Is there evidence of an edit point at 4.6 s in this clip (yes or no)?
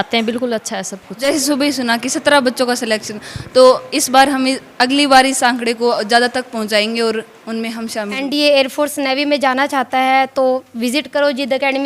no